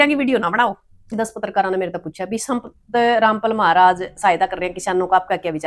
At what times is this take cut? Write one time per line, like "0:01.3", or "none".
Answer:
0:01.1